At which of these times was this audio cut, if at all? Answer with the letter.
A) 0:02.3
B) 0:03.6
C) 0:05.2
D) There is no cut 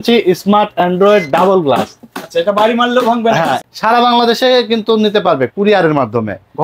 B